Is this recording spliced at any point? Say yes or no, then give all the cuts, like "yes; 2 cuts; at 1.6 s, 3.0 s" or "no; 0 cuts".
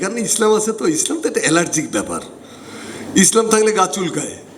no; 0 cuts